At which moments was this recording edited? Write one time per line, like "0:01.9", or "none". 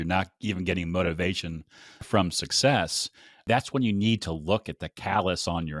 0:03.4